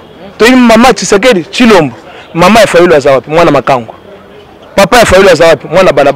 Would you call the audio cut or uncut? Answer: uncut